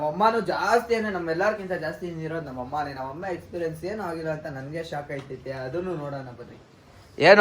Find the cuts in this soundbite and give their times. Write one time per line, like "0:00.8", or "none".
none